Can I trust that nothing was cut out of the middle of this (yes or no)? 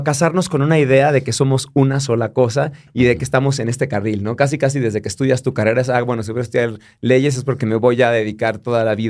yes